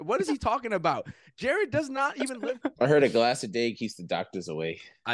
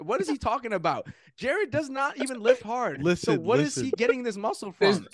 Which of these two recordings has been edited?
first; 1 cut; at 2.4 s

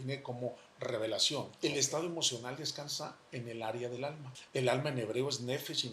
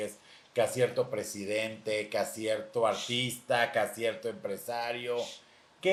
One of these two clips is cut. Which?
first; 2 cuts; at 1.5 s, 4.3 s

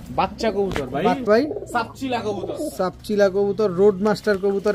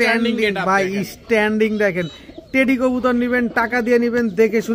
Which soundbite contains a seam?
first; 1 cut; at 1.3 s

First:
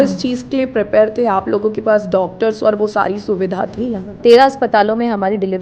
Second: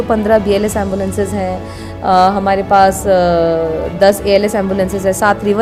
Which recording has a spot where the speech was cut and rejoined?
first; 1 cut; at 4.2 s

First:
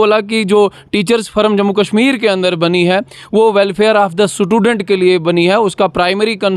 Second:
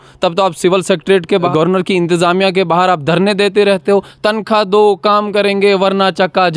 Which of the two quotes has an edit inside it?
second; 1 cut; at 1.5 s

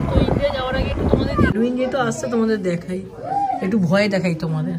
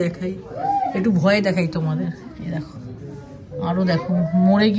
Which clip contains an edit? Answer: first; 1 cut; at 1.5 s

